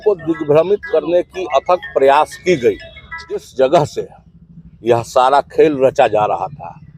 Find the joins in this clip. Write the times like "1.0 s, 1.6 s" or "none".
3.5 s